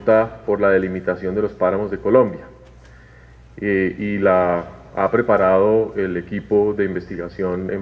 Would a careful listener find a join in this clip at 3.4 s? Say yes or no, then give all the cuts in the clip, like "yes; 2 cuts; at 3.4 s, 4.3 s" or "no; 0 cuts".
no; 1 cut; at 4.6 s